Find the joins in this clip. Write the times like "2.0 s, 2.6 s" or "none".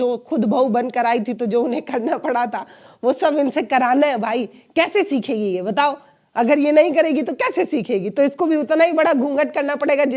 none